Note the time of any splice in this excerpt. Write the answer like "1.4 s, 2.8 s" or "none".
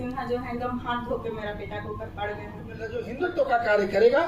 3.1 s